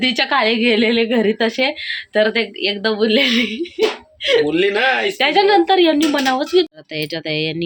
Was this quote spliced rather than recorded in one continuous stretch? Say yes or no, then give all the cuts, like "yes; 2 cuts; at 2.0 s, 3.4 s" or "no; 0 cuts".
yes; 1 cut; at 6.7 s